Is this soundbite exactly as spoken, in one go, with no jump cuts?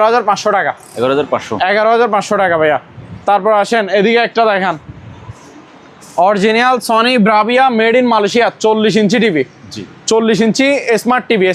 yes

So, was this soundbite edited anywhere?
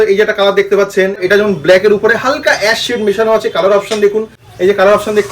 yes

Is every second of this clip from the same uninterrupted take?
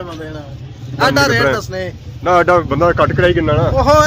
yes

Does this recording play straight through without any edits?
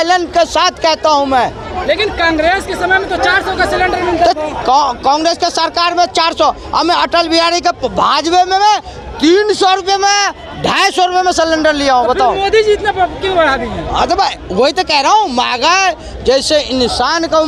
yes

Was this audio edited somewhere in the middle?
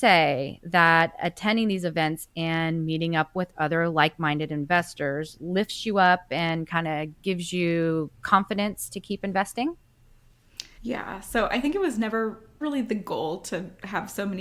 no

